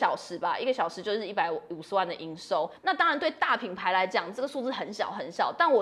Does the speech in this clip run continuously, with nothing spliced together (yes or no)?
yes